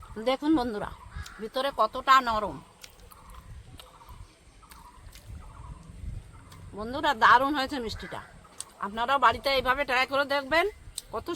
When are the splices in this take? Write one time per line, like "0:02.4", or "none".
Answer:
none

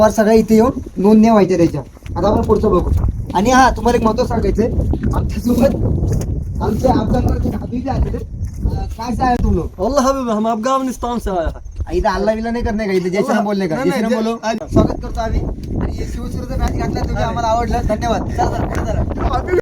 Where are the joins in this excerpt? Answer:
0:14.6

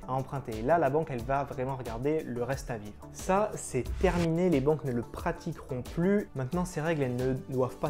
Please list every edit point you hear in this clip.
0:06.3

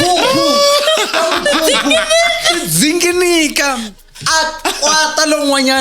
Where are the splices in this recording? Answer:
0:03.9

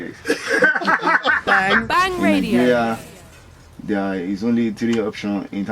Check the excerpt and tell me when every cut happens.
0:01.7

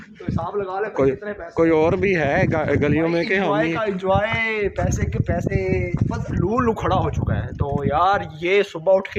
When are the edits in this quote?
0:06.3

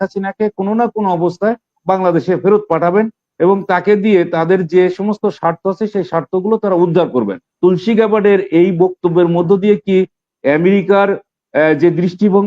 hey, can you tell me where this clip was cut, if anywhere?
0:07.5

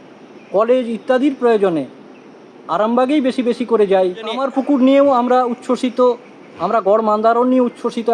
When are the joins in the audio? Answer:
0:04.4

